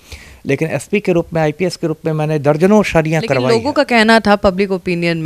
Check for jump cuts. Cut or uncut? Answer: cut